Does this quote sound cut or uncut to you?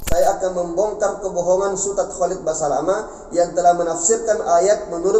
uncut